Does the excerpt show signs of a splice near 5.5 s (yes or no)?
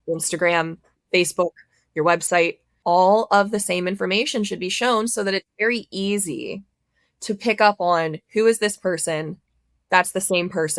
no